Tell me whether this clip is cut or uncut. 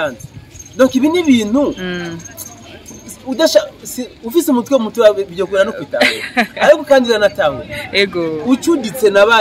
uncut